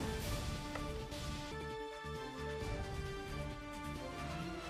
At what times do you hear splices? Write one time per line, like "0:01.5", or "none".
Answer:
none